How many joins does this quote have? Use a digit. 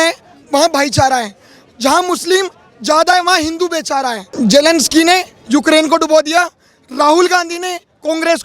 1